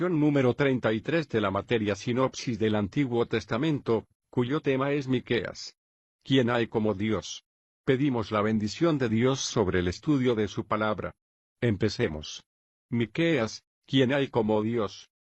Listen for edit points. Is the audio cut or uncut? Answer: uncut